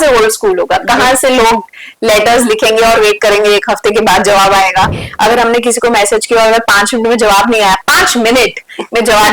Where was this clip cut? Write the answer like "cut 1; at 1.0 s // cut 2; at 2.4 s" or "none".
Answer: cut 1; at 5.0 s